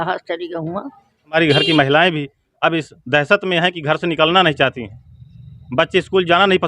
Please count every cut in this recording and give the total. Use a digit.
1